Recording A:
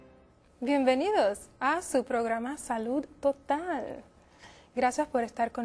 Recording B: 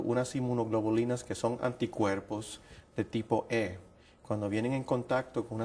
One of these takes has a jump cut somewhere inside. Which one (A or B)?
B